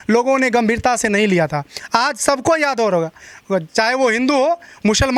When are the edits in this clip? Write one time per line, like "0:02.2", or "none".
none